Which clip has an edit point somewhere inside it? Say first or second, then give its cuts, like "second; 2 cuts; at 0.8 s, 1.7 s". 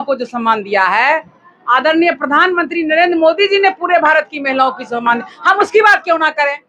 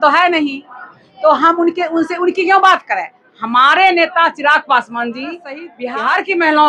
second; 1 cut; at 5.7 s